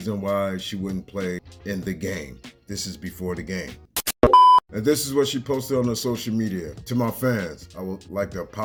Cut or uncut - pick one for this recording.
uncut